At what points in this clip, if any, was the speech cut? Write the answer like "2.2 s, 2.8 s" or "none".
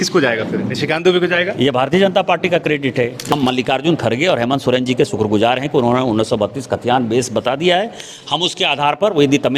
3.3 s